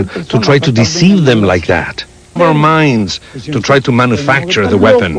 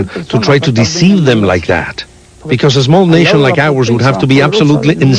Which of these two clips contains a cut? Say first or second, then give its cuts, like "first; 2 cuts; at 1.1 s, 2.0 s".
second; 1 cut; at 2.2 s